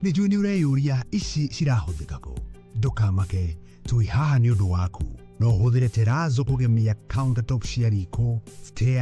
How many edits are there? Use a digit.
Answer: 0